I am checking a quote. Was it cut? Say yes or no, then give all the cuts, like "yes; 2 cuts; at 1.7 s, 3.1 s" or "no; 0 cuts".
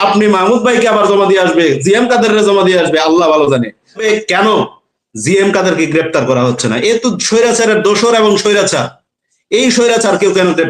yes; 1 cut; at 4.0 s